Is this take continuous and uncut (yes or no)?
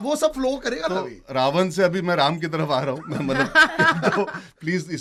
yes